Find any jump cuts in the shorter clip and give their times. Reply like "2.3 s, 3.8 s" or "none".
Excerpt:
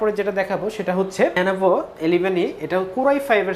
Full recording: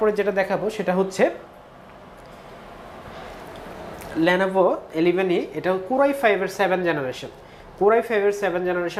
1.4 s